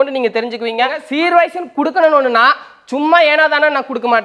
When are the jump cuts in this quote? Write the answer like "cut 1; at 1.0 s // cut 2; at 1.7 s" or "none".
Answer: cut 1; at 1.1 s